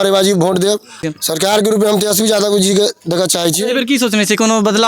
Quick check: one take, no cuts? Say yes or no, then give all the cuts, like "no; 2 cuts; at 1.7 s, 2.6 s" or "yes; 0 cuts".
no; 2 cuts; at 1.1 s, 3.6 s